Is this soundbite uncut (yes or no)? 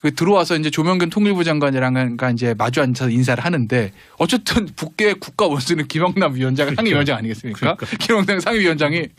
no